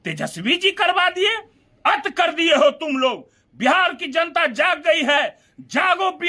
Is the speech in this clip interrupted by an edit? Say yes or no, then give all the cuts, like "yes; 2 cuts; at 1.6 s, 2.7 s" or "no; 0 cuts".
no; 0 cuts